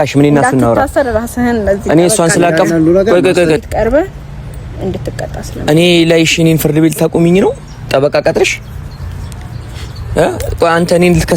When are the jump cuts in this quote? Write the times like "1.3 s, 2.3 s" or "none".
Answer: 3.6 s